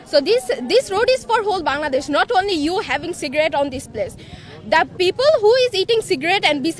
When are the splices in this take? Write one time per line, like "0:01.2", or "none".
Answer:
none

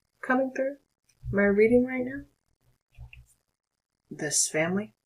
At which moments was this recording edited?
0:02.9

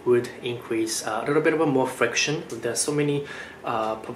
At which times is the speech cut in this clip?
0:02.5

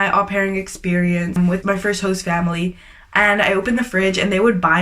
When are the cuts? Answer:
0:01.6

